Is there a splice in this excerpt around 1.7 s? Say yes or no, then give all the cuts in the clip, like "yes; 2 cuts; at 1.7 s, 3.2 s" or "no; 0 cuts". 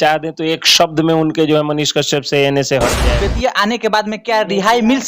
no; 1 cut; at 3.1 s